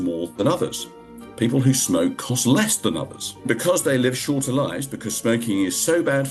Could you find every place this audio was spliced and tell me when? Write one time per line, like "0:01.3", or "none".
0:03.5